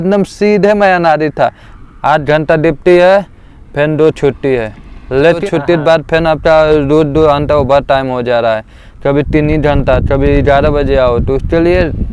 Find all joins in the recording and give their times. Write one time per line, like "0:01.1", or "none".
0:01.7
0:05.4